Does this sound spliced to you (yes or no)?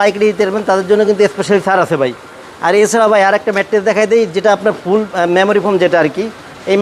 no